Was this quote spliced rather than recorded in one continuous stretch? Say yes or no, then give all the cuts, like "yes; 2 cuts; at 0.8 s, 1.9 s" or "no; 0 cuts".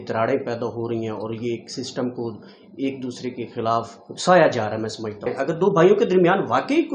yes; 1 cut; at 5.3 s